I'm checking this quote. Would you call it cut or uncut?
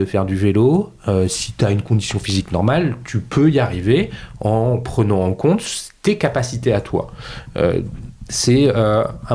uncut